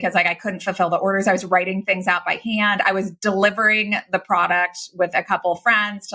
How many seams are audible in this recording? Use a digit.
0